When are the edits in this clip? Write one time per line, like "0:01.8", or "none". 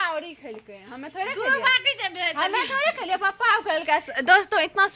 none